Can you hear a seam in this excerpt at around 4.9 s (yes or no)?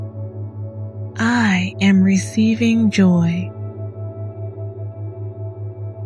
no